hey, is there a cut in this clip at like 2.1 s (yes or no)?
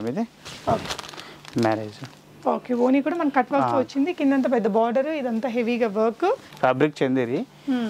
no